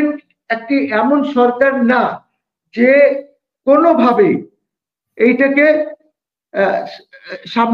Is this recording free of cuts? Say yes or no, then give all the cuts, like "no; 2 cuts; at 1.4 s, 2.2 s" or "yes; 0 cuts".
yes; 0 cuts